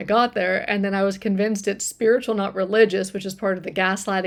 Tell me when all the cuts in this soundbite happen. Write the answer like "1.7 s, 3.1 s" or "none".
none

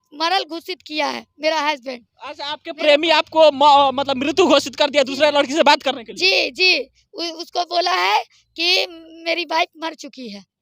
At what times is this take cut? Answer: none

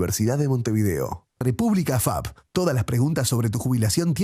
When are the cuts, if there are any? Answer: 1.2 s

